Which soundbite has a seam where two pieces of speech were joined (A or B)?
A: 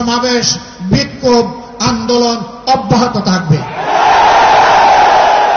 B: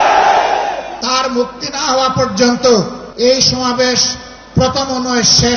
B